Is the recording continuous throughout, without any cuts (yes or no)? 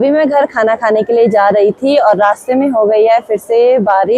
yes